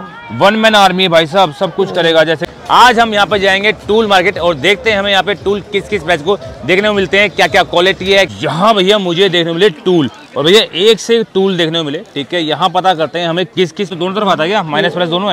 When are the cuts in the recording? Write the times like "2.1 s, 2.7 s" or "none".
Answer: 2.4 s, 8.3 s, 13.9 s